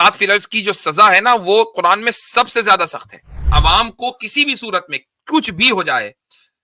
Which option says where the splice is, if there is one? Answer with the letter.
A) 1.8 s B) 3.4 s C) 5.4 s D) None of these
B